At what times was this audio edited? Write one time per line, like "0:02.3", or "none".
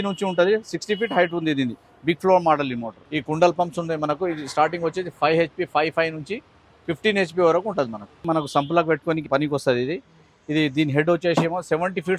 0:03.0
0:08.2
0:09.2